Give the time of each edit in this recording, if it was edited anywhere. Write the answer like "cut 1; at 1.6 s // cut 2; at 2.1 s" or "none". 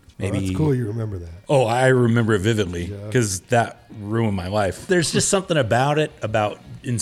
cut 1; at 4.8 s